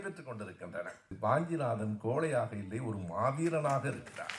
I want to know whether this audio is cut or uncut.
cut